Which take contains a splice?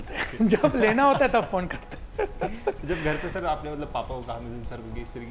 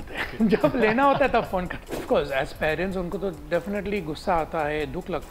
second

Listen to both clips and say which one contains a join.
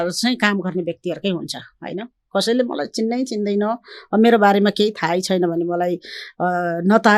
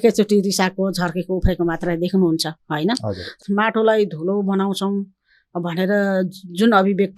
second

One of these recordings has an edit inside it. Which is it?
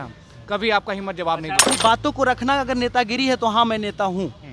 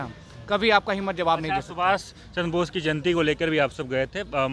first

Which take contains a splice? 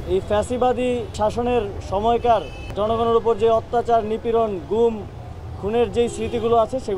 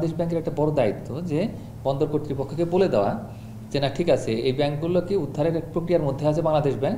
first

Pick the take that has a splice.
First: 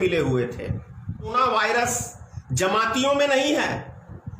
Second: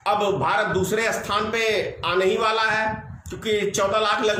first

